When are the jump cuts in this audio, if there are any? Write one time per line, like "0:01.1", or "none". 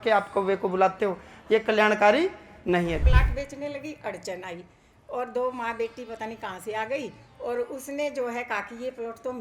0:03.0